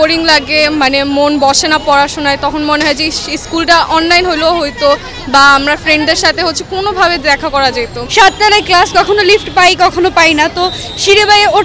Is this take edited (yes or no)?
no